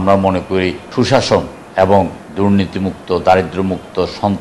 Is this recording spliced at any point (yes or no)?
yes